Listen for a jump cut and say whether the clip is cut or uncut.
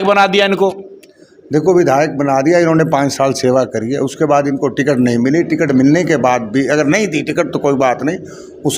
uncut